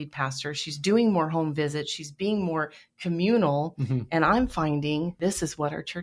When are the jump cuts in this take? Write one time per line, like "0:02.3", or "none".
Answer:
0:05.1